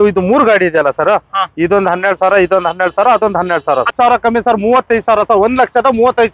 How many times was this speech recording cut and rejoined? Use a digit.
1